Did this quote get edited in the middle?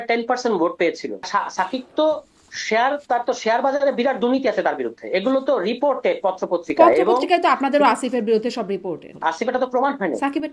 yes; 2 cuts; at 1.3 s, 9.1 s

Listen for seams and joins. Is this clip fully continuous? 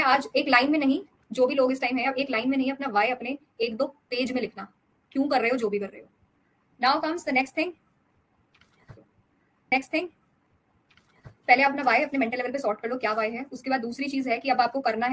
yes; 0 cuts

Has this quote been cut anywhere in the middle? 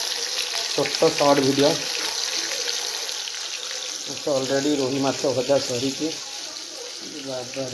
no; 0 cuts

